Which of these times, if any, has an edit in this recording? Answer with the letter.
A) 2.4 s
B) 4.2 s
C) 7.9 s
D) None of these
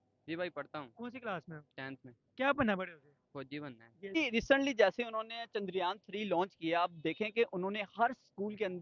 B